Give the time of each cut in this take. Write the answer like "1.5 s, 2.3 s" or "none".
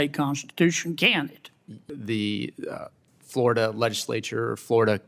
1.8 s